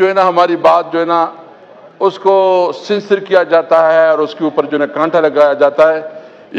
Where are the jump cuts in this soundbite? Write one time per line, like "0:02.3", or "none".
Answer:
none